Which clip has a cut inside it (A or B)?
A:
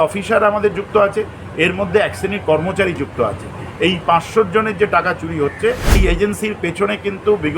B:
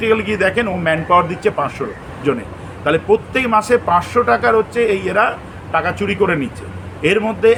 A